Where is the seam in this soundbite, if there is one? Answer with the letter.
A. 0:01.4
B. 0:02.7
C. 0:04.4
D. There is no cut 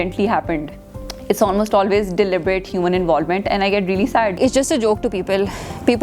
C